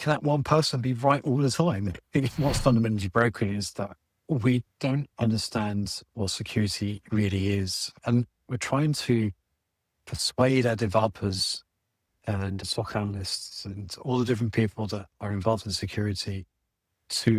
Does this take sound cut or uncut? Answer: cut